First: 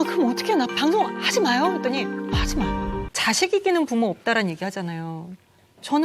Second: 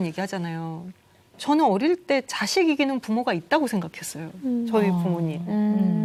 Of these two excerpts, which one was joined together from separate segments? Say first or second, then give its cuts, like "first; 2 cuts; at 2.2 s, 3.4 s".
first; 1 cut; at 3.1 s